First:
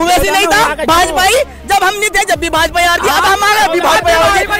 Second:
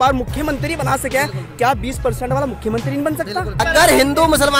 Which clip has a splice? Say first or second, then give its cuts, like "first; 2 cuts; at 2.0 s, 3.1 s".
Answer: second; 1 cut; at 3.6 s